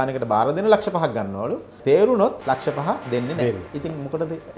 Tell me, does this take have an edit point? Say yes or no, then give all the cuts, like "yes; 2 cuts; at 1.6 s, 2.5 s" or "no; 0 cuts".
yes; 3 cuts; at 1.8 s, 2.4 s, 3.7 s